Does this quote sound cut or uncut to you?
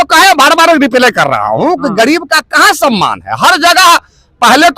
uncut